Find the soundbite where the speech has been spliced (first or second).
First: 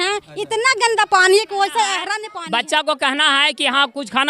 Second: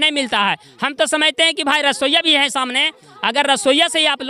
first